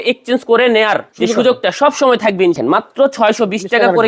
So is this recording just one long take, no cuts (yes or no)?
no